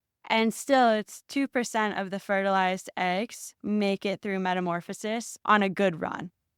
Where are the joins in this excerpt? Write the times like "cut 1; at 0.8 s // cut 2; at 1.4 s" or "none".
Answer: none